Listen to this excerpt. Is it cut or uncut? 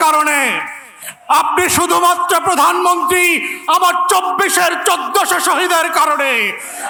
uncut